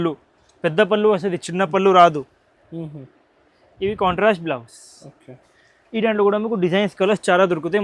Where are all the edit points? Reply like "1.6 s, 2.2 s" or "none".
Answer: none